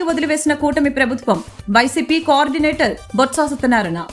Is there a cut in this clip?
no; 0 cuts

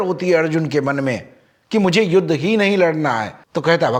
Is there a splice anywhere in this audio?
no; 0 cuts

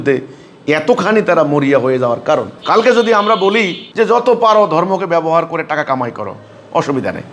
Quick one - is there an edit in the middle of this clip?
no; 0 cuts

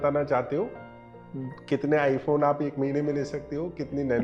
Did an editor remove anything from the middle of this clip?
no; 0 cuts

